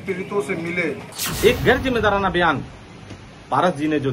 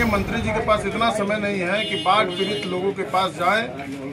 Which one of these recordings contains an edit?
first; 1 cut; at 1.2 s

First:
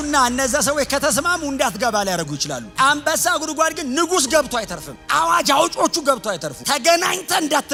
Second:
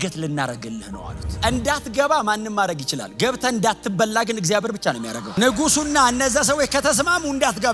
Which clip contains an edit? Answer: second; 1 cut; at 1.3 s

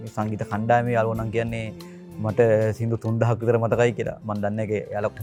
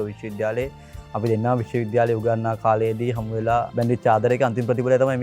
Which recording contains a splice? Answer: second; 1 cut; at 3.7 s

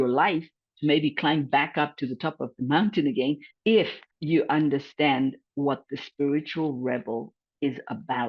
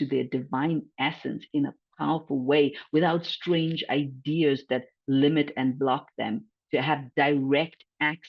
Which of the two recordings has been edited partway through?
first; 1 cut; at 3.5 s

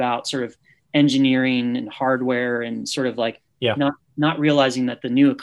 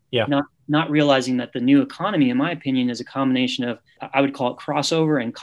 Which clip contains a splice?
second; 1 cut; at 4.0 s

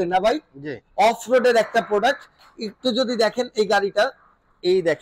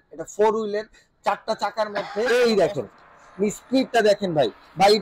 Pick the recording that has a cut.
second; 1 cut; at 2.2 s

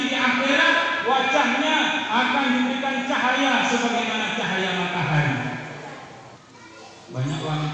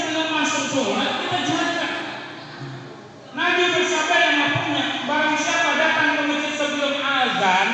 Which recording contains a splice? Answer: first; 1 cut; at 6.2 s

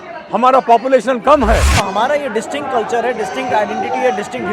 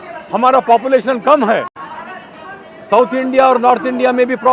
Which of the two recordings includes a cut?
first; 1 cut; at 1.8 s

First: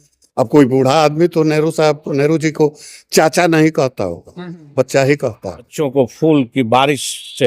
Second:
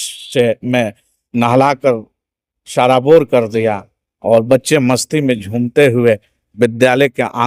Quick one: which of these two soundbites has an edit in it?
first; 1 cut; at 5.8 s

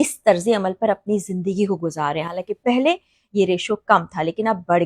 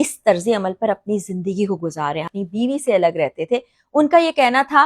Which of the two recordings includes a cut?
second; 1 cut; at 2.3 s

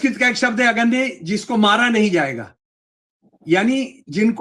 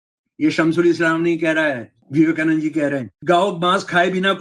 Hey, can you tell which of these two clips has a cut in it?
second; 2 cuts; at 1.9 s, 3.1 s

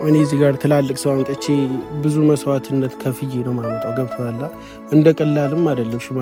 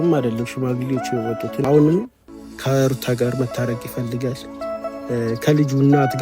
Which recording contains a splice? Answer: second; 1 cut; at 1.6 s

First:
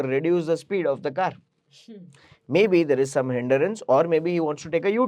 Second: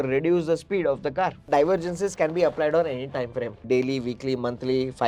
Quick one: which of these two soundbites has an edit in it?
second; 2 cuts; at 1.5 s, 3.6 s

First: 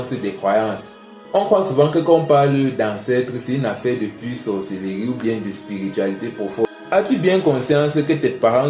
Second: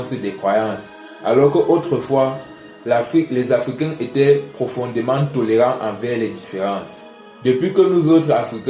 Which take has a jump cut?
first; 2 cuts; at 1.2 s, 6.7 s

